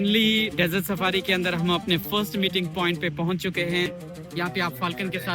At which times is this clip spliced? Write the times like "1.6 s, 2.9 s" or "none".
3.9 s

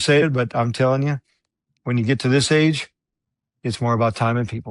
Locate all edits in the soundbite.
none

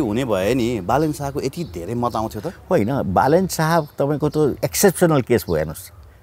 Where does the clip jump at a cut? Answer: none

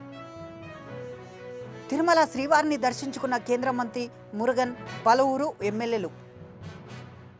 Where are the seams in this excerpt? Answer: 1.2 s

